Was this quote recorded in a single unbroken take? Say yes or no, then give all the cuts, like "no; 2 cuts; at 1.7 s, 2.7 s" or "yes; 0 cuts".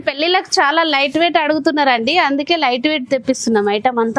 yes; 0 cuts